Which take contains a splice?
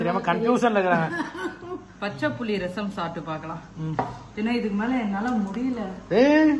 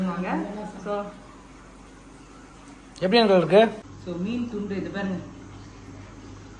second; 1 cut; at 3.8 s

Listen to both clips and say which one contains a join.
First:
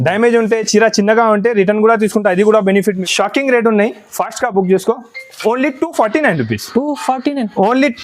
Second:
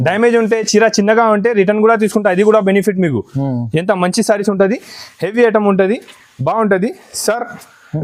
first; 1 cut; at 3.0 s

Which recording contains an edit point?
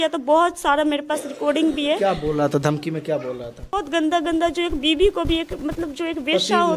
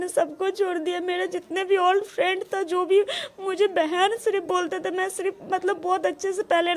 first; 1 cut; at 3.8 s

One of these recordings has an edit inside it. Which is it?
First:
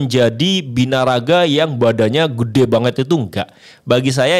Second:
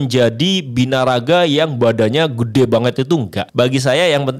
second; 1 cut; at 3.4 s

